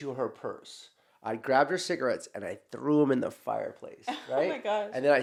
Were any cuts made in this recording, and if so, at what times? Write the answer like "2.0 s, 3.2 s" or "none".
none